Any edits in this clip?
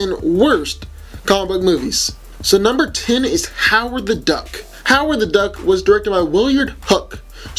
yes; 1 cut; at 2.6 s

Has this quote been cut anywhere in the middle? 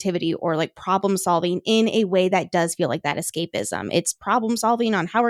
no; 0 cuts

